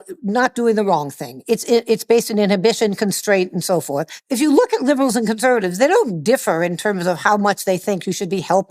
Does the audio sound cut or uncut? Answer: cut